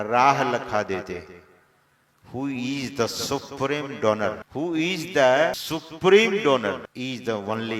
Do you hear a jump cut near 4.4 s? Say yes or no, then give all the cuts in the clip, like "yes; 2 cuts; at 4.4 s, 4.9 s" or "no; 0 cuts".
yes; 3 cuts; at 4.4 s, 5.6 s, 6.9 s